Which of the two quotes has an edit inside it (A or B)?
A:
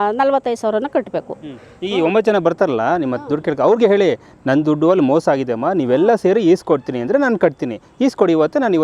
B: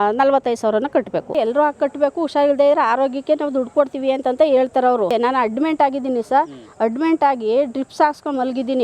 B